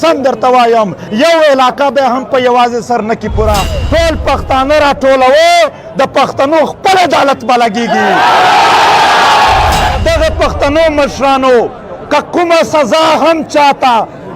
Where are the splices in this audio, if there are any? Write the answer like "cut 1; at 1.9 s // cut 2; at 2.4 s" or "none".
cut 1; at 1.0 s // cut 2; at 3.8 s // cut 3; at 9.9 s